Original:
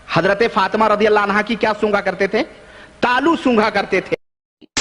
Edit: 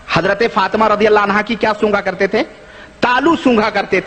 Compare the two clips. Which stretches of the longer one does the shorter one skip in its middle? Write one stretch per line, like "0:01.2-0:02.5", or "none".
none